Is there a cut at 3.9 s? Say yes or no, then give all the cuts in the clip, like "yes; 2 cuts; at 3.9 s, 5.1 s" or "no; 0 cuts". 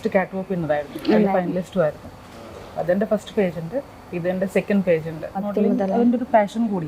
no; 1 cut; at 5.3 s